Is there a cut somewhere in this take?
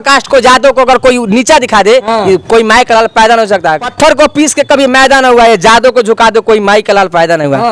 yes; 1 cut; at 3.9 s

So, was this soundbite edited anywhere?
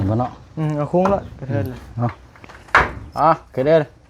no; 0 cuts

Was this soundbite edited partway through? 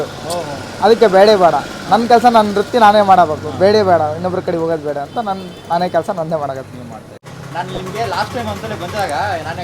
no; 0 cuts

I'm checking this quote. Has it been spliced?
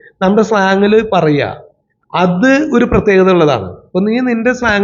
no; 0 cuts

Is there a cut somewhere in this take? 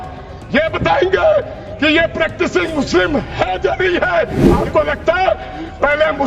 yes; 1 cut; at 4.5 s

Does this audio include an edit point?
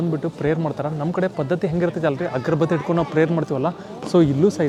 no; 0 cuts

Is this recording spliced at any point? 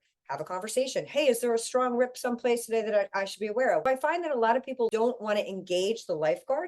yes; 1 cut; at 3.8 s

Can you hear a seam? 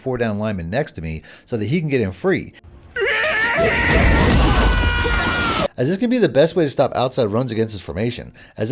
yes; 2 cuts; at 2.6 s, 5.7 s

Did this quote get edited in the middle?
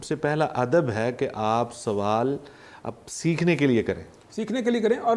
no; 0 cuts

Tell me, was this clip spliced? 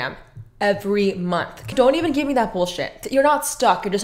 yes; 1 cut; at 1.7 s

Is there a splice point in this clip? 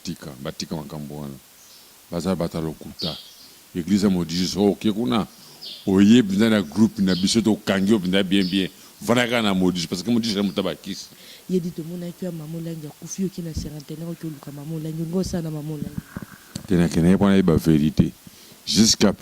yes; 1 cut; at 11.3 s

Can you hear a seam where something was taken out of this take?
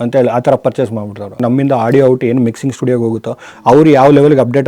yes; 1 cut; at 1.4 s

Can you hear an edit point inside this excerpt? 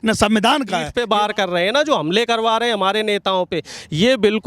yes; 1 cut; at 0.9 s

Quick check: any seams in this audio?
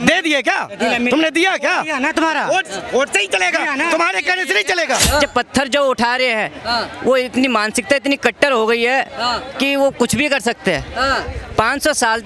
yes; 1 cut; at 5.0 s

